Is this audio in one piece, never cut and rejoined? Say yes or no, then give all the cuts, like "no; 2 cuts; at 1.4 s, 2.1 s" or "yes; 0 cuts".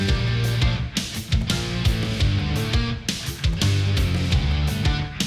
yes; 0 cuts